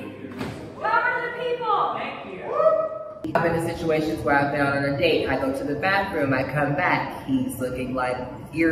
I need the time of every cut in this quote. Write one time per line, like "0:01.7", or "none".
0:03.3